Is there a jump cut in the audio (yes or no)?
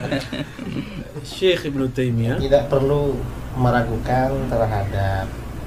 yes